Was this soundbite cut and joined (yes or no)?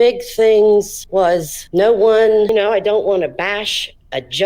yes